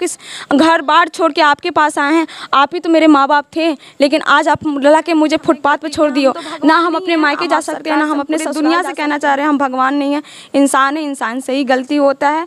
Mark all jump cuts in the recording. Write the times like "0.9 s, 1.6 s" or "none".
8.5 s